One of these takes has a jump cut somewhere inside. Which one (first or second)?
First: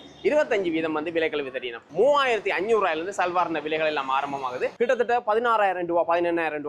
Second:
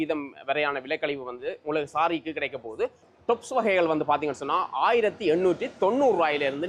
first